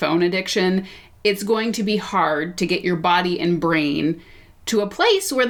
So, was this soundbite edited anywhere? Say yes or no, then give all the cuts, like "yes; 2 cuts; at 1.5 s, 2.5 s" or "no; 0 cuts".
no; 0 cuts